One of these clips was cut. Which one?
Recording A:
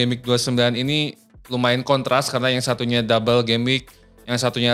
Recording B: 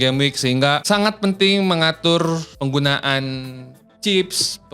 B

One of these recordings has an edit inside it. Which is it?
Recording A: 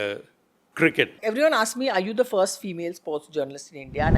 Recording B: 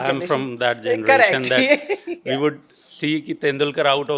A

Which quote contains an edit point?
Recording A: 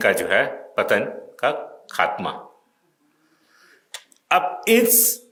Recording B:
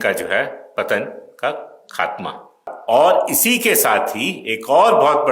B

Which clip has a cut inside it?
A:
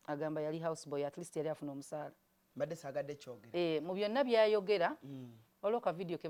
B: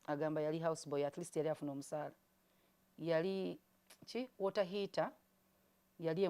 B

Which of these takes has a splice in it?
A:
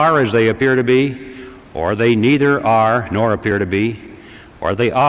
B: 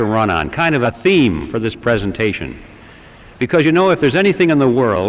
B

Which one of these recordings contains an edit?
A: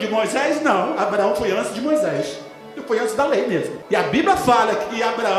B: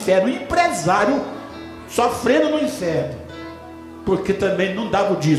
A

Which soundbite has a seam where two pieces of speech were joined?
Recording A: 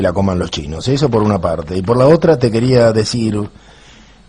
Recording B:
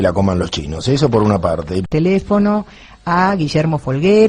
A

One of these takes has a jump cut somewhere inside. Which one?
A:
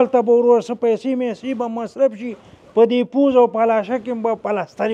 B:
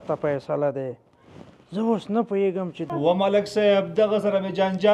B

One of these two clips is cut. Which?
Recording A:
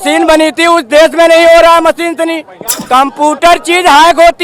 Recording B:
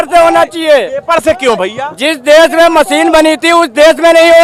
A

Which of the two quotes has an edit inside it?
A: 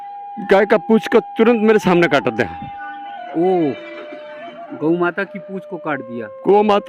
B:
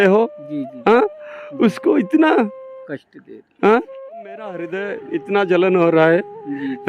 B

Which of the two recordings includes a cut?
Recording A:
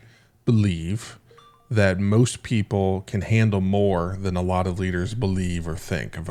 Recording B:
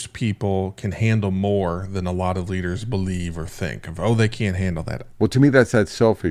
B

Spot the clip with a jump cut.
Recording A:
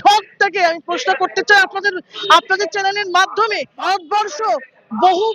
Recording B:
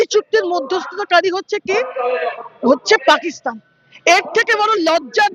A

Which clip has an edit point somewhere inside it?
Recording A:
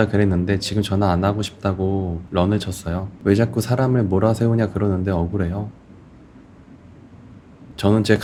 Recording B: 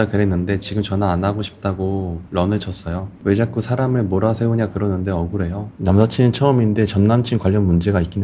B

